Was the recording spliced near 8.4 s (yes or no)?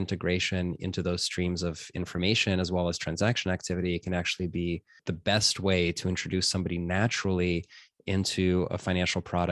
no